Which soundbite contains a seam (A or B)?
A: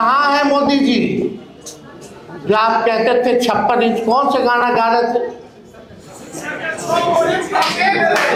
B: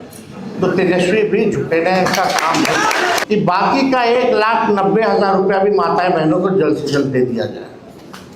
B